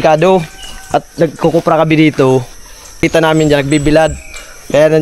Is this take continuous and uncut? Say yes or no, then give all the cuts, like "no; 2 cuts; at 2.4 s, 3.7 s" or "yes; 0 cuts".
no; 1 cut; at 3.0 s